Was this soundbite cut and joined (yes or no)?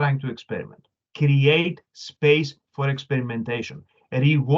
yes